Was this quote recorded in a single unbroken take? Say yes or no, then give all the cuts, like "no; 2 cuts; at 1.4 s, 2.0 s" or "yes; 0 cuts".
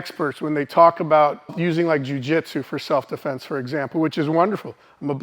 no; 1 cut; at 1.6 s